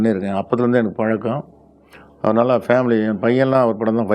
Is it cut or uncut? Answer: uncut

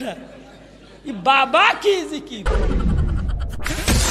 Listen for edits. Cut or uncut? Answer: cut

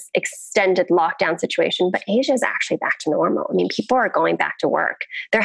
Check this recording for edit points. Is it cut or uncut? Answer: uncut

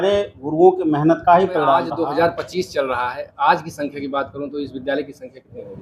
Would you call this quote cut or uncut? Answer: cut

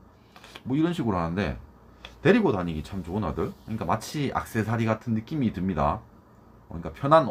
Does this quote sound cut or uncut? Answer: uncut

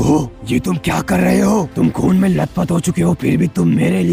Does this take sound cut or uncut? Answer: uncut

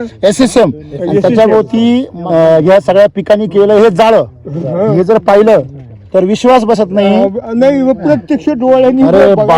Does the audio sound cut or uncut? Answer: uncut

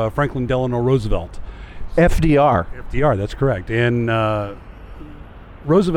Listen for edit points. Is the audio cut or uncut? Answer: uncut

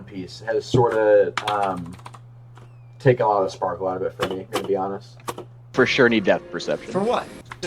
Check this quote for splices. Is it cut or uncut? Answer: cut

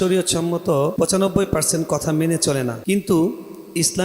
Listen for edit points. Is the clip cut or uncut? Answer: cut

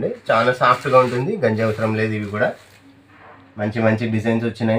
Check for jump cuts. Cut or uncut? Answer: uncut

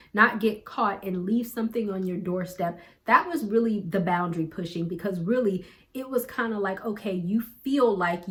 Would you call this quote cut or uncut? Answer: uncut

